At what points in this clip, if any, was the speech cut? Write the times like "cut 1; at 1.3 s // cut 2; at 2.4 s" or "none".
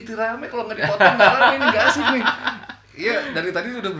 none